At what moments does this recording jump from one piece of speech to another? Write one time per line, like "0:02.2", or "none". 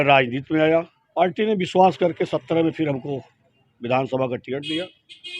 0:01.0